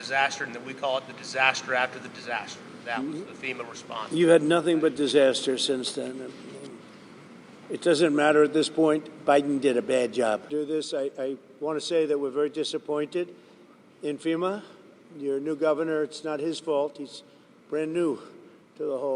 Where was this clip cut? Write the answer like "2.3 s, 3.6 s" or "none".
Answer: 10.5 s